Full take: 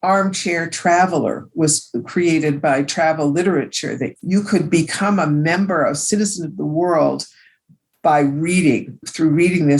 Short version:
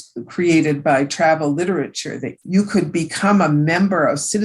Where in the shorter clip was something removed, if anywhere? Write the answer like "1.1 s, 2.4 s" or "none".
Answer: none